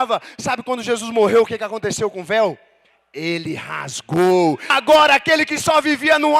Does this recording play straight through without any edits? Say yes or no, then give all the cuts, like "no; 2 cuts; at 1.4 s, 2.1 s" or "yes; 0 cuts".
no; 1 cut; at 4.8 s